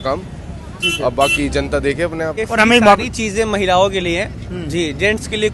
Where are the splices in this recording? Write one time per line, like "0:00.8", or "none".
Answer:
0:02.5